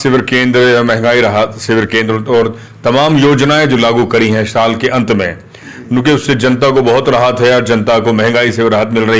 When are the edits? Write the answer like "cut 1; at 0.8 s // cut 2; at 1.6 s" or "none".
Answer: none

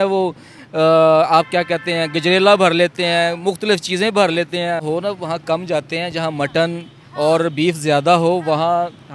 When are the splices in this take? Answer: cut 1; at 4.8 s

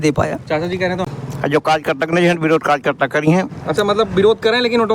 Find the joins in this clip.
cut 1; at 1.0 s

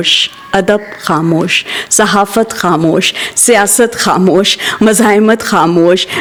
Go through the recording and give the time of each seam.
none

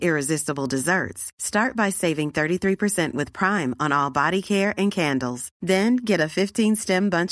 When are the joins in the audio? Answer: none

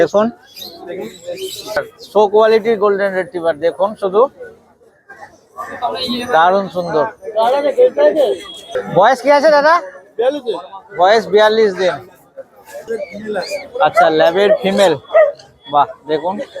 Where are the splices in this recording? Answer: cut 1; at 1.9 s // cut 2; at 12.8 s

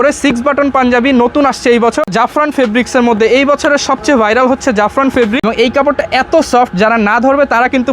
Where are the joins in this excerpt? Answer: cut 1; at 2.1 s // cut 2; at 5.3 s

